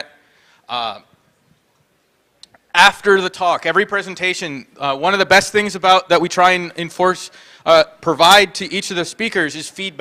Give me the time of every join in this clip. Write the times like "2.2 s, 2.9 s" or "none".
none